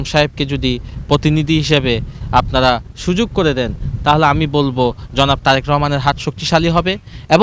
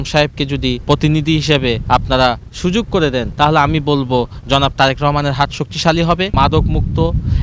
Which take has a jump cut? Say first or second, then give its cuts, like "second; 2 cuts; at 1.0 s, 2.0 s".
second; 4 cuts; at 0.8 s, 1.8 s, 3.3 s, 6.3 s